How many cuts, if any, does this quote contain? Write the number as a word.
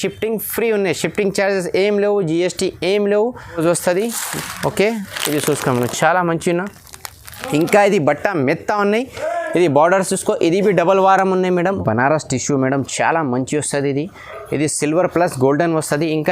two